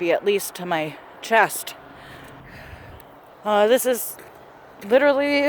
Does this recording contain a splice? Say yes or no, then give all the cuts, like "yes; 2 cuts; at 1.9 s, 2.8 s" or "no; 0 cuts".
yes; 1 cut; at 2.5 s